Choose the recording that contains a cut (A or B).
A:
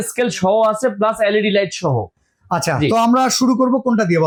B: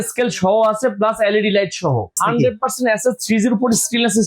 B